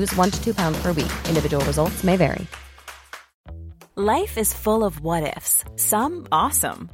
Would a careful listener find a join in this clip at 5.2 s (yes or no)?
no